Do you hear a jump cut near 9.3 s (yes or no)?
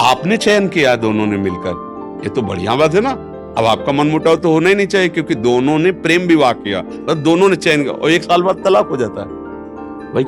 no